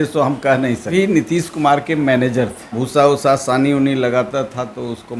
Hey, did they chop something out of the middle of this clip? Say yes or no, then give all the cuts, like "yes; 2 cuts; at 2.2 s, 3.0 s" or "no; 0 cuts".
yes; 2 cuts; at 0.9 s, 2.8 s